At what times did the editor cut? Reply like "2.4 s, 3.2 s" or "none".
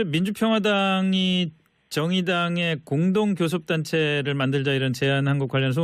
4.3 s